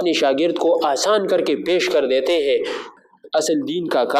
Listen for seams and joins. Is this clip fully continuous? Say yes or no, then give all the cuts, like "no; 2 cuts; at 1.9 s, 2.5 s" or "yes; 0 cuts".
no; 1 cut; at 2.8 s